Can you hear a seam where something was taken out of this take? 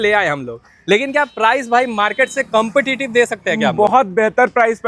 no; 0 cuts

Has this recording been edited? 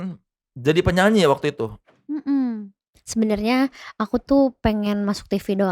no; 0 cuts

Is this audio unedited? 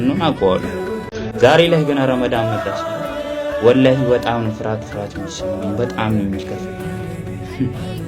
no; 1 cut; at 1.1 s

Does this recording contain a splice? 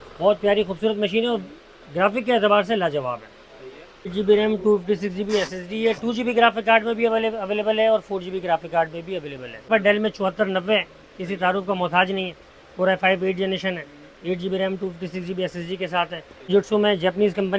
yes; 3 cuts; at 4.1 s, 9.7 s, 16.3 s

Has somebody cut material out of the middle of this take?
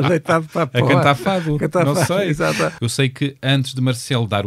yes; 1 cut; at 2.8 s

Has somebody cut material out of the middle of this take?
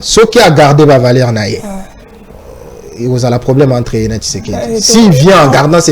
no; 0 cuts

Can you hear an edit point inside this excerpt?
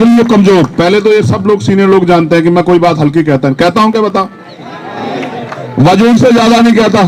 no; 0 cuts

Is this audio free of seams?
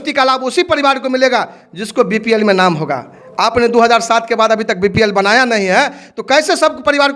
yes; 0 cuts

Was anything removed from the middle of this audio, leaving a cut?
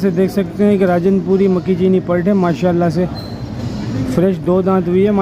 no; 0 cuts

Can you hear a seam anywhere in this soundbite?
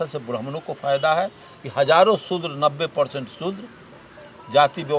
no; 0 cuts

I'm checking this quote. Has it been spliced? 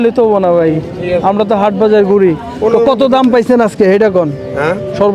no; 0 cuts

